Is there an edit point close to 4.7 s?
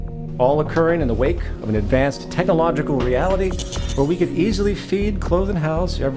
no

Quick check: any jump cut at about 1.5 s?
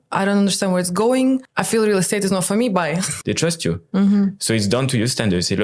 yes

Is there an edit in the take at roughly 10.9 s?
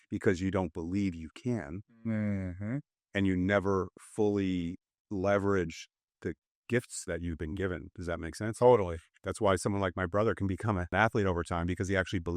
yes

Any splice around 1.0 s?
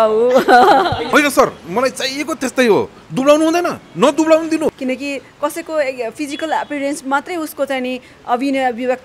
yes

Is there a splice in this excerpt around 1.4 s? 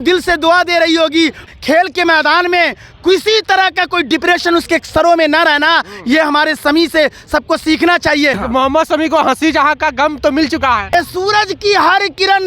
yes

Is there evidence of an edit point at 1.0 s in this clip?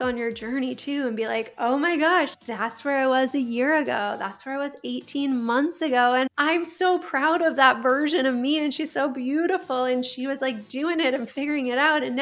no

